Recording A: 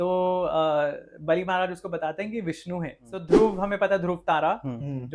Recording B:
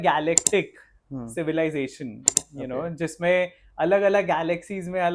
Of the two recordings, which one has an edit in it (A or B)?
A